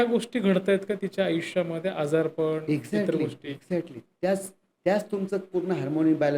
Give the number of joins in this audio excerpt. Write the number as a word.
zero